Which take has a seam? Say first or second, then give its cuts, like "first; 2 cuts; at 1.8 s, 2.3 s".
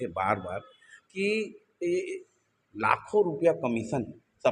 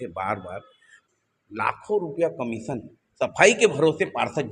second; 1 cut; at 1.0 s